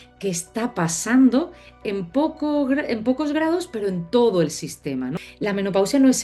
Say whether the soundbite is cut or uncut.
cut